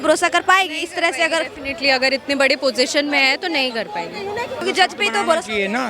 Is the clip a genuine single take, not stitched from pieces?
no; 1 cut; at 4.6 s

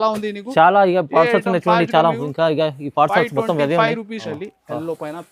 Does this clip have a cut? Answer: yes; 1 cut; at 4.3 s

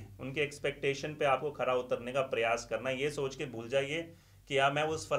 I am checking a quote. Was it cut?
no; 0 cuts

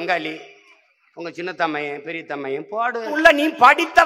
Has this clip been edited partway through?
yes; 1 cut; at 3.1 s

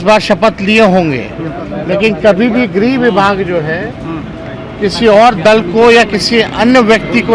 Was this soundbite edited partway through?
no; 0 cuts

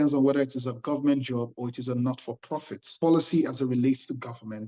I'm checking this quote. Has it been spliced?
yes; 1 cut; at 2.9 s

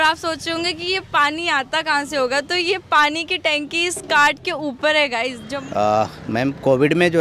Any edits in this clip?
yes; 1 cut; at 5.6 s

